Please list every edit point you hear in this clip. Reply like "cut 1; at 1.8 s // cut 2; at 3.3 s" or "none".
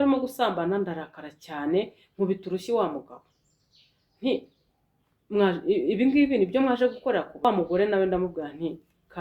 cut 1; at 7.4 s